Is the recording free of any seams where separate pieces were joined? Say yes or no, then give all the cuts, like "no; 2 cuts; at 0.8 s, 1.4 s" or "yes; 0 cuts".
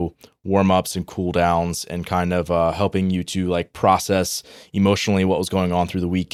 yes; 0 cuts